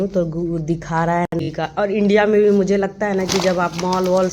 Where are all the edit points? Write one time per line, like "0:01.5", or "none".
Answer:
0:01.3